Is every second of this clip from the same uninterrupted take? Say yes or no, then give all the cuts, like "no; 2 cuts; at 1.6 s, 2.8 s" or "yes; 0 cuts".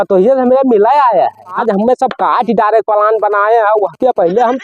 no; 1 cut; at 1.6 s